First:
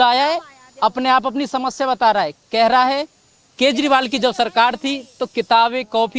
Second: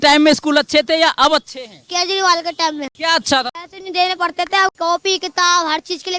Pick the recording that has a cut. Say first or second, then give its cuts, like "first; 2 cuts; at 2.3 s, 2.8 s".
second; 1 cut; at 3.6 s